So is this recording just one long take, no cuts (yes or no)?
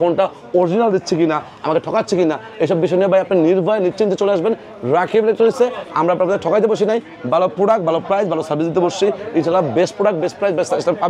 yes